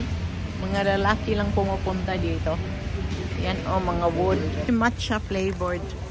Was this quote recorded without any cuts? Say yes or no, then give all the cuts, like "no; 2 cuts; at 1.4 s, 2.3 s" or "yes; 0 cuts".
no; 1 cut; at 4.6 s